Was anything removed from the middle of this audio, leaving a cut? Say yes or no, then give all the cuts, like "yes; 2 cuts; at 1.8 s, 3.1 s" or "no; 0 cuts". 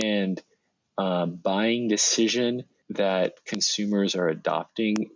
yes; 1 cut; at 2.8 s